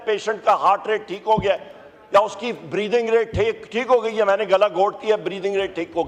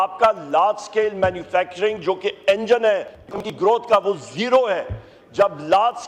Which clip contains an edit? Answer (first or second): second